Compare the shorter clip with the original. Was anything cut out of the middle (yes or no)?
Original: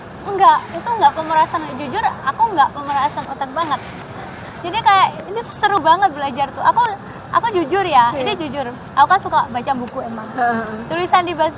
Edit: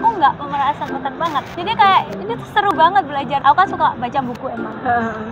yes